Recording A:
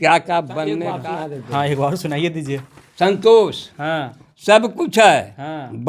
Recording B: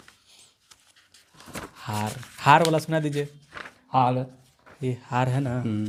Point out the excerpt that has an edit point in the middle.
A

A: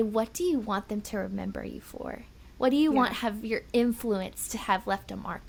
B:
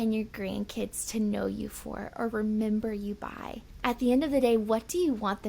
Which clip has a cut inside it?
B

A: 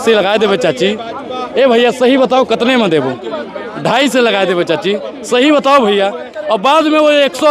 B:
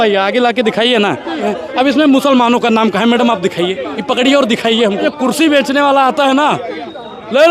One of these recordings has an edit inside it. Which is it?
B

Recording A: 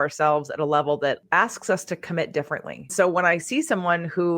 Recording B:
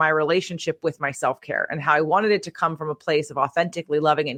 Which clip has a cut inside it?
A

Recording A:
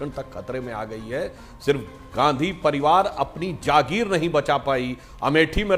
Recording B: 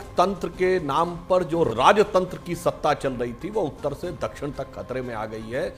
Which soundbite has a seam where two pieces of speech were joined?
B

